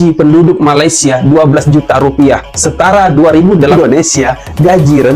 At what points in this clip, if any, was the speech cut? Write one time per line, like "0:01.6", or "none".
0:03.7